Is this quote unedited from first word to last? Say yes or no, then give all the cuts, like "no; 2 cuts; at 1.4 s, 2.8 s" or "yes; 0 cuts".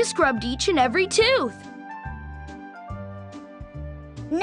yes; 0 cuts